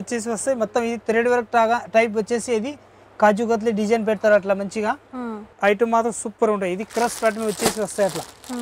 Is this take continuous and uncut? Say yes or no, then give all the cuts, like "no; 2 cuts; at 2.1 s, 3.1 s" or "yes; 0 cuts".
no; 1 cut; at 5.5 s